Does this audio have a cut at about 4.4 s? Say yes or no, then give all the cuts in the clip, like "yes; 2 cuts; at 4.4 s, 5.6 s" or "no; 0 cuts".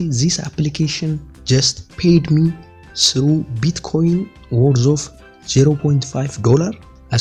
no; 0 cuts